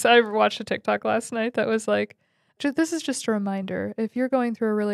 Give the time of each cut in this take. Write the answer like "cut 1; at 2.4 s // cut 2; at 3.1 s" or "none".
cut 1; at 2.6 s